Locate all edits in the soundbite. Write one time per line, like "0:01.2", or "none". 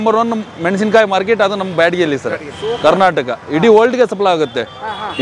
none